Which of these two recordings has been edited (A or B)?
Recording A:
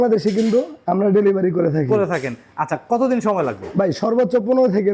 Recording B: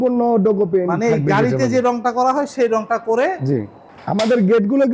B